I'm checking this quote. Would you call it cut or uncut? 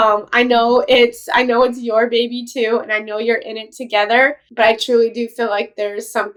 uncut